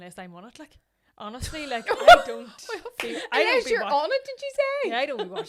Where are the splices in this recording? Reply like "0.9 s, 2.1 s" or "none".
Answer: none